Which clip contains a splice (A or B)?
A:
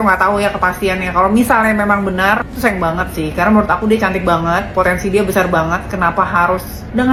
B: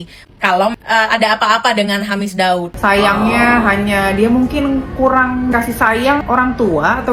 B